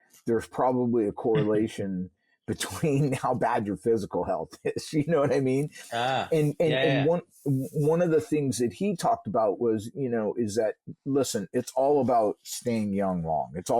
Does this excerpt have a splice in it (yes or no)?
no